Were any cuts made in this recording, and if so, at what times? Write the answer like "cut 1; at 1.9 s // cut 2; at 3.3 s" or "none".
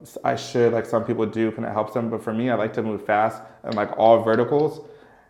none